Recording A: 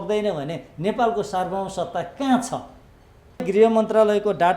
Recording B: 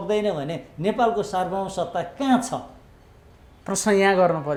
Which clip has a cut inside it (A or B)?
A